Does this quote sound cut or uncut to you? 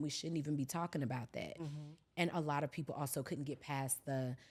uncut